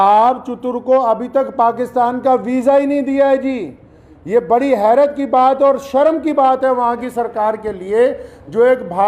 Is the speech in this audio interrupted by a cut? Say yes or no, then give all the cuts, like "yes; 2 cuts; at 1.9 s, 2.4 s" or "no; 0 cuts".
no; 0 cuts